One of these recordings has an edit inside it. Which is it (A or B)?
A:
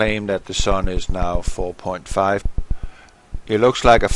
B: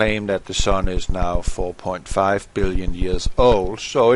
B